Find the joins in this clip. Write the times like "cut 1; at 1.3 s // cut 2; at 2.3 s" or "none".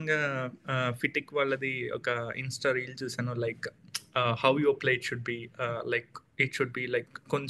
none

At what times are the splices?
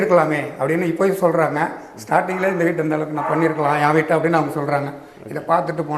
none

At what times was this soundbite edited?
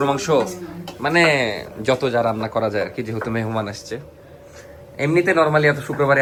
none

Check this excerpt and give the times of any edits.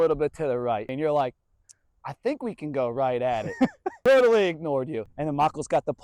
cut 1; at 0.9 s // cut 2; at 3.5 s // cut 3; at 5.0 s

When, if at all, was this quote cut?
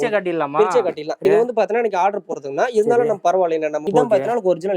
cut 1; at 1.2 s // cut 2; at 3.8 s

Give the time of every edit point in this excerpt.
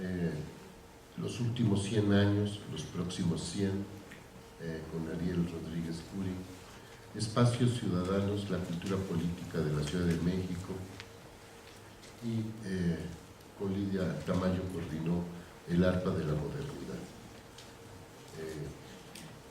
cut 1; at 5.3 s

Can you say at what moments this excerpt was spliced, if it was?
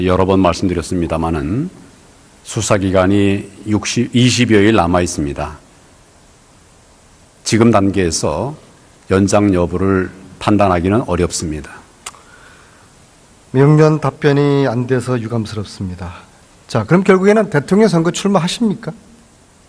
none

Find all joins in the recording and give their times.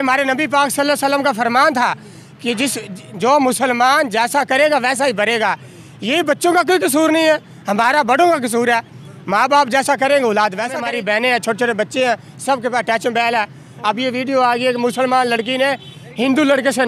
cut 1; at 10.8 s

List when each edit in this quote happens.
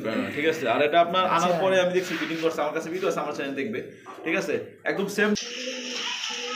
cut 1; at 5.4 s

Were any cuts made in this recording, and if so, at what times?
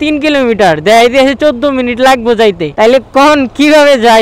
none

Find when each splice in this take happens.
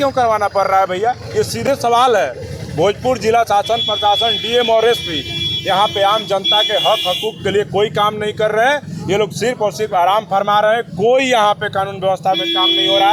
none

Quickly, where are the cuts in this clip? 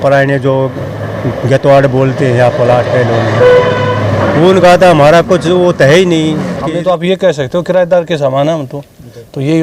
cut 1; at 6.6 s

